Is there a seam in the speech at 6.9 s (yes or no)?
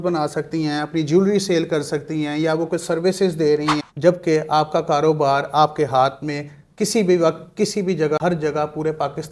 no